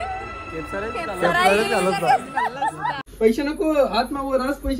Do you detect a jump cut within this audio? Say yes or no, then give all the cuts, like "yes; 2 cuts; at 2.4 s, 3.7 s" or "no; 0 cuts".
yes; 1 cut; at 3.0 s